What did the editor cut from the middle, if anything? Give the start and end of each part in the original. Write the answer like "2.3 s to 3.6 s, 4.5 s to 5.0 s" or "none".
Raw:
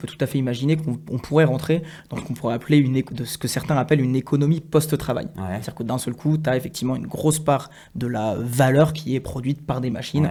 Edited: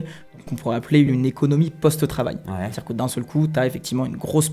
2.9 s to 4.0 s